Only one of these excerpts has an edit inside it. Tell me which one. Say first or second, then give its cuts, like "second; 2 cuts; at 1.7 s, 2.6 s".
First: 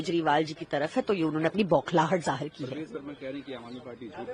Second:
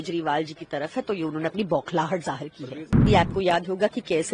second; 1 cut; at 3.0 s